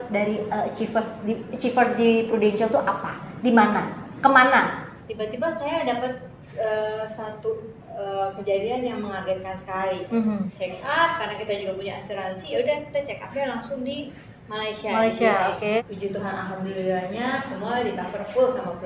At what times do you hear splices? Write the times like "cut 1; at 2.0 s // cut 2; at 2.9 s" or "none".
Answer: cut 1; at 5.0 s // cut 2; at 10.5 s // cut 3; at 15.8 s

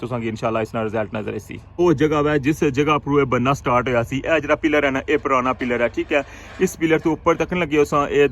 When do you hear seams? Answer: cut 1; at 1.6 s

